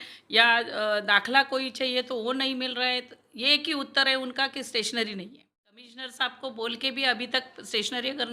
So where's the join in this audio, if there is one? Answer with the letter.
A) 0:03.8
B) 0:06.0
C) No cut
B